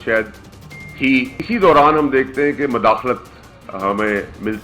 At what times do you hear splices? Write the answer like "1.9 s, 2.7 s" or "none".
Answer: 1.4 s